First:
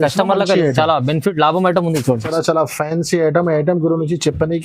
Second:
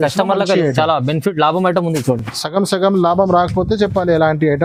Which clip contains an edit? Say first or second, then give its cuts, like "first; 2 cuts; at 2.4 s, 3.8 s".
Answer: first; 1 cut; at 2.3 s